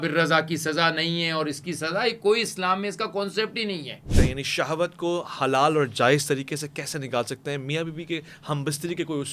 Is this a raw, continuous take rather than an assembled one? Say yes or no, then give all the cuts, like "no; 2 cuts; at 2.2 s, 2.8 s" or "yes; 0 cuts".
no; 1 cut; at 4.0 s